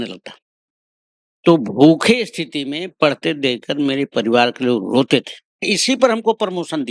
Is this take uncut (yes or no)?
no